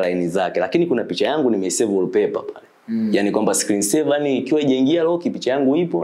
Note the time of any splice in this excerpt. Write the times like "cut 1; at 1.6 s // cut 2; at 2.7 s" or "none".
none

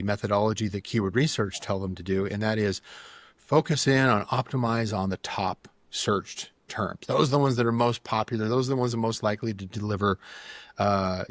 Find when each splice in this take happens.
none

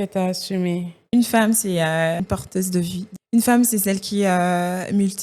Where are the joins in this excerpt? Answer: cut 1; at 1.1 s // cut 2; at 2.8 s

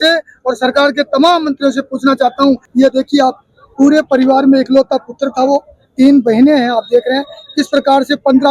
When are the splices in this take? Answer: cut 1; at 2.7 s

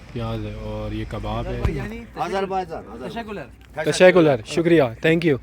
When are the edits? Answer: cut 1; at 1.6 s

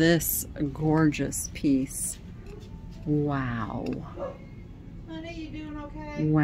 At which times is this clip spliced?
none

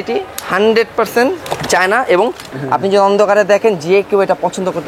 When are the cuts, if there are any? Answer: cut 1; at 2.5 s

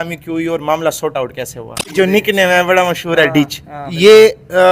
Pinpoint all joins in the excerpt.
cut 1; at 1.9 s

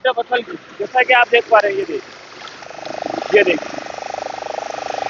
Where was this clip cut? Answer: none

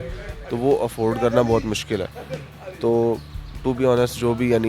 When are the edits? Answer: none

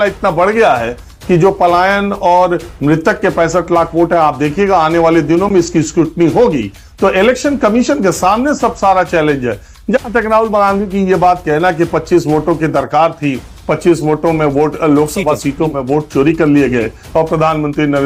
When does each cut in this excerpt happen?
none

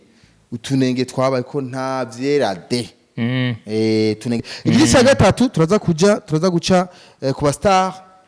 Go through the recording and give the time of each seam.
cut 1; at 4.5 s

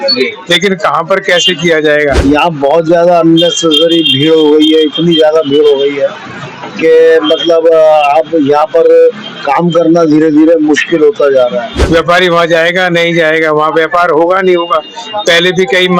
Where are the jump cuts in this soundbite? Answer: cut 1; at 2.2 s // cut 2; at 11.7 s

